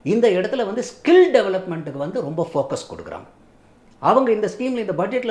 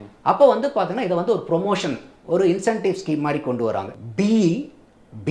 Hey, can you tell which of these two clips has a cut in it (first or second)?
second